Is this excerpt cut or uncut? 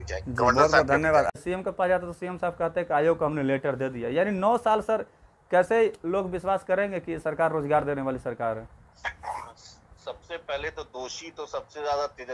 cut